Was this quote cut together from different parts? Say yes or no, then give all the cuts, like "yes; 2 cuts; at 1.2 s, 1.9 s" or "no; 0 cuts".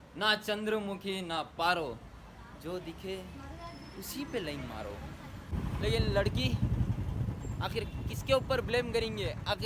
yes; 1 cut; at 5.5 s